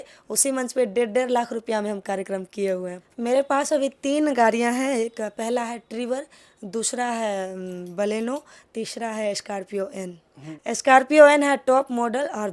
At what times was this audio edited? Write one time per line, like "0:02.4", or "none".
0:03.0
0:10.4